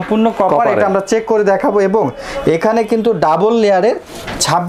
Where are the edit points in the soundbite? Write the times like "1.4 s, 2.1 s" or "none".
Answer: none